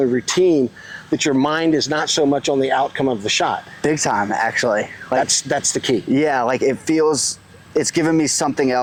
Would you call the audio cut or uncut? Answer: uncut